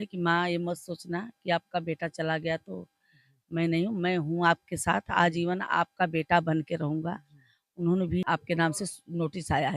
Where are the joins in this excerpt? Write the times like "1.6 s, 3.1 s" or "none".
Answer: 8.2 s